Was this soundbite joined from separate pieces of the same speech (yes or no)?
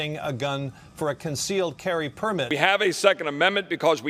no